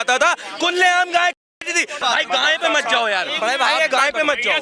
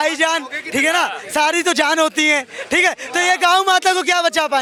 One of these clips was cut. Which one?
first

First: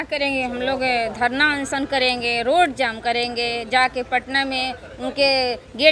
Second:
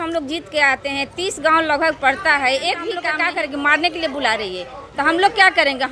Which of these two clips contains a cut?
second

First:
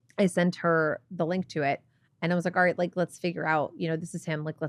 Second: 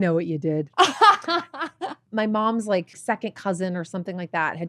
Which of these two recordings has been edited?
second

